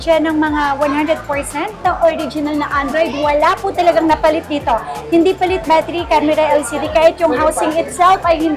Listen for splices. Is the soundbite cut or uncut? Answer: uncut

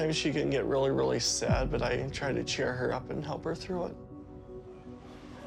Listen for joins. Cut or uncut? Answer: uncut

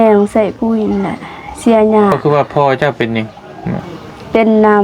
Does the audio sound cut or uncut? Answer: cut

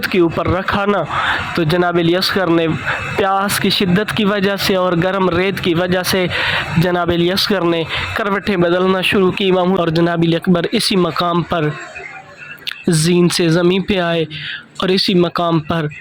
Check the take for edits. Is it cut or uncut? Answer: cut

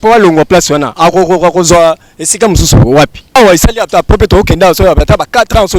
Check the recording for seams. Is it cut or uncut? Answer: cut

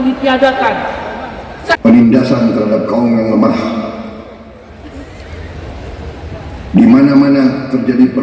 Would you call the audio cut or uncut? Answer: cut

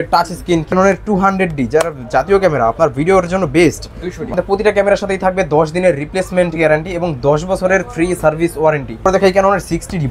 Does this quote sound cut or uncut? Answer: cut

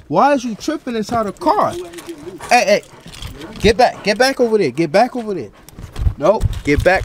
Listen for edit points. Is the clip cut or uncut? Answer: uncut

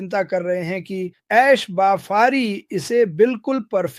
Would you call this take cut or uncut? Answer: uncut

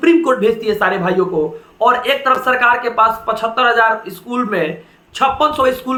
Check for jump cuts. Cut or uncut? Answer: uncut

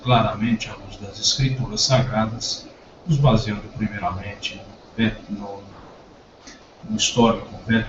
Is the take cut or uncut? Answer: uncut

